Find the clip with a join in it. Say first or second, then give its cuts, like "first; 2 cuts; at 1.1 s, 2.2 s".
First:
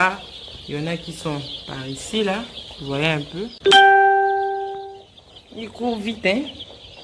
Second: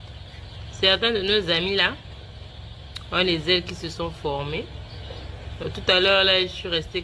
first; 1 cut; at 3.5 s